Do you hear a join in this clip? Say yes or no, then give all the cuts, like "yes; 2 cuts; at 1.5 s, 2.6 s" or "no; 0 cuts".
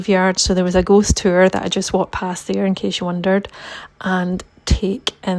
no; 0 cuts